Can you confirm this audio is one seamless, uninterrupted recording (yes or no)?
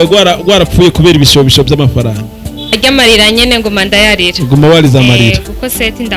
no